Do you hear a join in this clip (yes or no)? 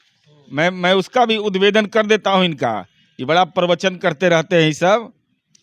no